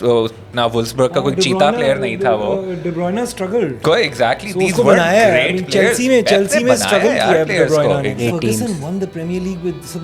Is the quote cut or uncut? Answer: cut